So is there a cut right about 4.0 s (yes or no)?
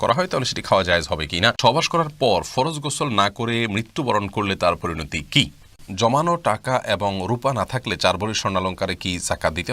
no